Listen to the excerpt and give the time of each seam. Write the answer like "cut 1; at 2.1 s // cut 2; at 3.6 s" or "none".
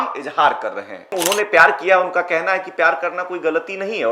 cut 1; at 1.1 s